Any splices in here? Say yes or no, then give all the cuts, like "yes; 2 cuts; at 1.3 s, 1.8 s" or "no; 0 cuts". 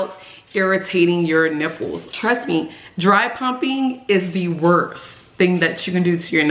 yes; 1 cut; at 2.1 s